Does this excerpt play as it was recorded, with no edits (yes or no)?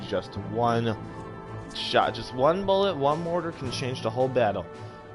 yes